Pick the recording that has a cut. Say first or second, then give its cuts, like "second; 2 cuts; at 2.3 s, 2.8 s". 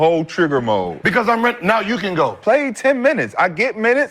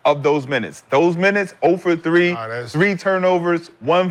first; 1 cut; at 2.4 s